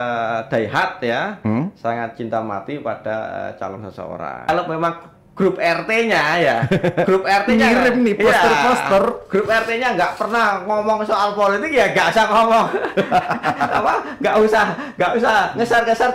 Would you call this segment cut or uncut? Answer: cut